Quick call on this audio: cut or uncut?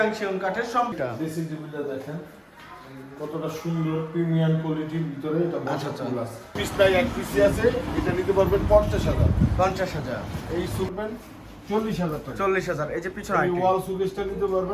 cut